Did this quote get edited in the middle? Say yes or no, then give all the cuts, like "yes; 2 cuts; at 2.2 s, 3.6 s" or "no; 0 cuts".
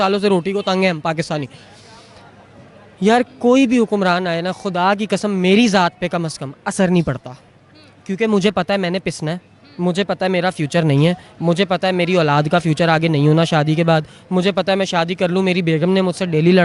no; 0 cuts